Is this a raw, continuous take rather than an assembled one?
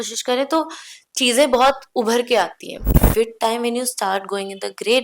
no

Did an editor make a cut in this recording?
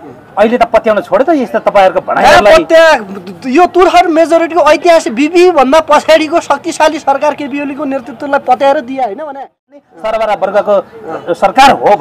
yes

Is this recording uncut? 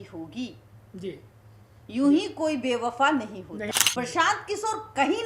no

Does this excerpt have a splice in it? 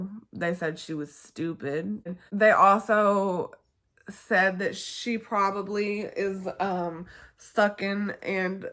yes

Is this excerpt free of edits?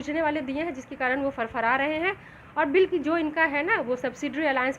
yes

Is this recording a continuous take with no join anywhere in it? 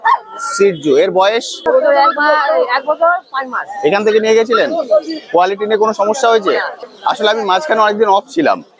no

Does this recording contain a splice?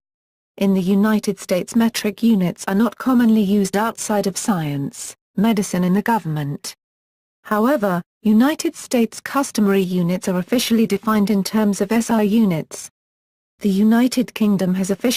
no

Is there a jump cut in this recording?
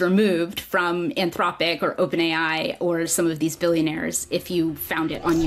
no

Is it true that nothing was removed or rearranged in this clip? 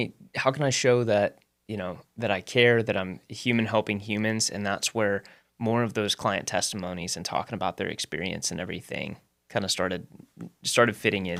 yes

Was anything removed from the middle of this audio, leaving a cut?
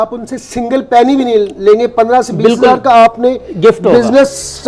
no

